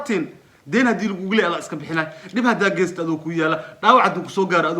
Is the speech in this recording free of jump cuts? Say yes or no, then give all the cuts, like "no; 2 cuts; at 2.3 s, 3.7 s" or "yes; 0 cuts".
yes; 0 cuts